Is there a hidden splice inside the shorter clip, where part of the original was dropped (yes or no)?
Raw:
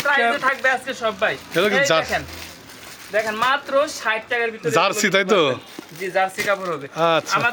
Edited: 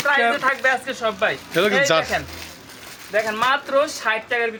no